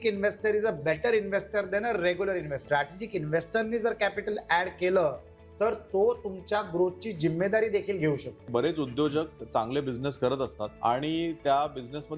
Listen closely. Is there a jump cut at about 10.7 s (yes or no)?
yes